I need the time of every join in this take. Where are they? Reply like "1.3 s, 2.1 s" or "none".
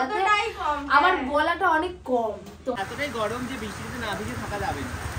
2.8 s